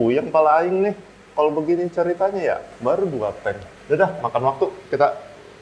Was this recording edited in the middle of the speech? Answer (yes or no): yes